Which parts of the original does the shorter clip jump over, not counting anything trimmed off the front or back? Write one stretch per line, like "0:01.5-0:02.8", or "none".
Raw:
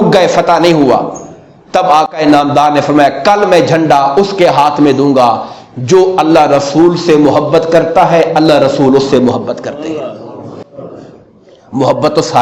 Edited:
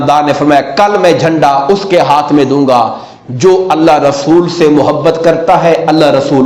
none

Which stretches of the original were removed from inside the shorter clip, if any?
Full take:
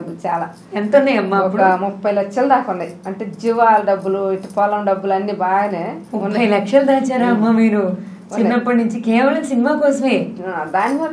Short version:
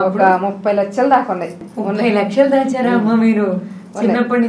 0:03.0-0:06.0

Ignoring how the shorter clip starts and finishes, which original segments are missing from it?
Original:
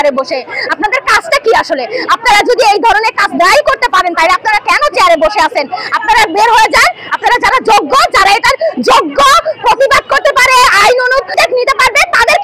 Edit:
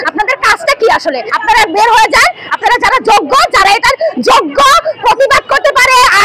0:01.9-0:05.9

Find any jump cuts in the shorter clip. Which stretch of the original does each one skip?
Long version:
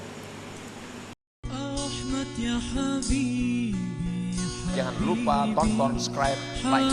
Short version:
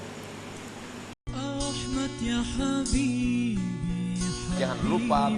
0:01.2-0:01.3

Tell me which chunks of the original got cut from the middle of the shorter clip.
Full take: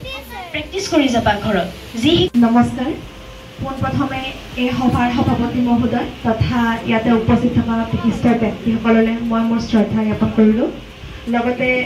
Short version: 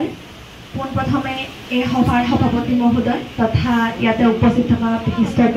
none

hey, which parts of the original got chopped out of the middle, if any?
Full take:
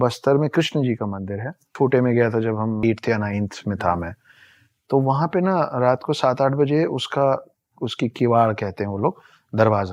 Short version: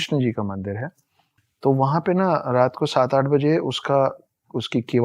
0:01.6-0:04.2

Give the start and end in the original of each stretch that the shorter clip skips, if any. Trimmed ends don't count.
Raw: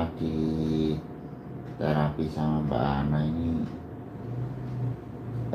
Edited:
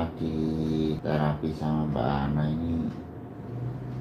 0:01.0-0:01.8

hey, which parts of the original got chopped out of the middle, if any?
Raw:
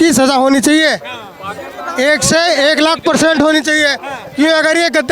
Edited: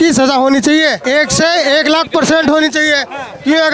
0:01.0-0:01.9

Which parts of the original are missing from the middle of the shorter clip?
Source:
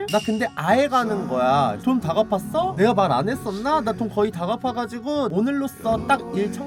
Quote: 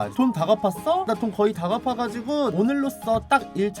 0:02.7-0:03.8

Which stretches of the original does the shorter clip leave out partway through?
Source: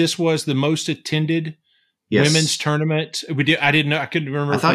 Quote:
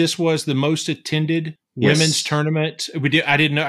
0:01.8-0:02.2

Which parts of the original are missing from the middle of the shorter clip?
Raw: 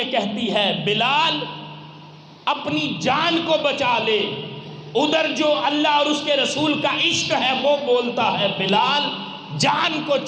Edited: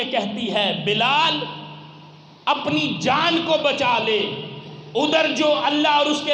none

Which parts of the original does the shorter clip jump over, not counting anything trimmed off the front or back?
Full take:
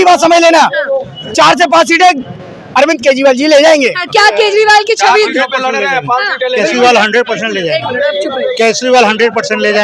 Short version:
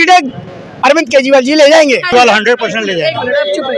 0:04.0-0:06.7

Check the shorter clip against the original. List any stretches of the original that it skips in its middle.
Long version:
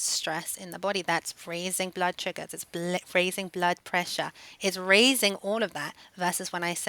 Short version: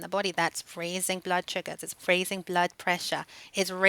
0:02.7-0:03.1

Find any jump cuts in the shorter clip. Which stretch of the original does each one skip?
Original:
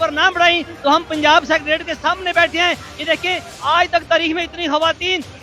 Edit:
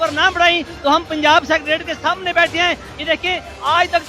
none

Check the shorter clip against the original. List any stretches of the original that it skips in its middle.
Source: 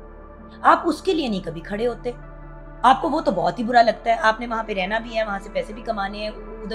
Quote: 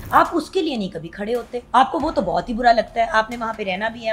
0:02.1-0:02.7

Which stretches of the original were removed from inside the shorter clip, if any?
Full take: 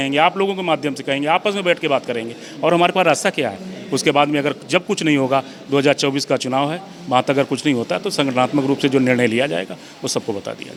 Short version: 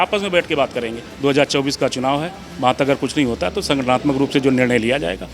0:02.4-0:05.6

